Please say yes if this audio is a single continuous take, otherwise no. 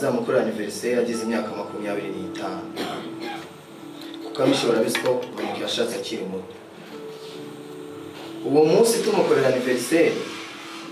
yes